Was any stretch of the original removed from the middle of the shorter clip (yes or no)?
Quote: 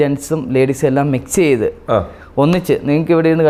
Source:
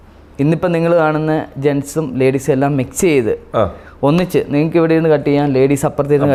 no